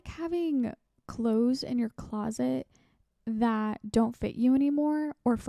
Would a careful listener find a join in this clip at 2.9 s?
no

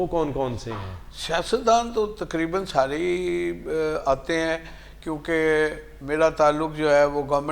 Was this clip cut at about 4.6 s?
no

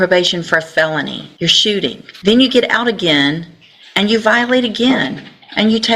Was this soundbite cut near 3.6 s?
no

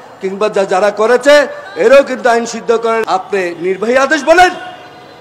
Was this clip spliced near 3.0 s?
yes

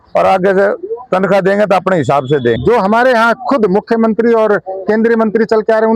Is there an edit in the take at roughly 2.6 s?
yes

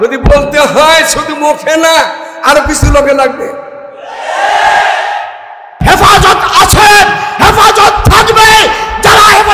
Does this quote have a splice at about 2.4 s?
no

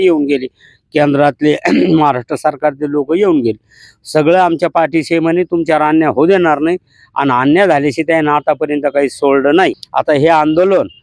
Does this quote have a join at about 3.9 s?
no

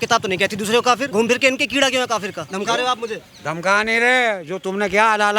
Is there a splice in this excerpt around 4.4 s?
no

